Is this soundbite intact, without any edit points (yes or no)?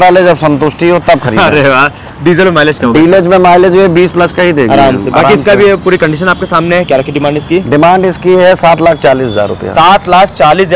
yes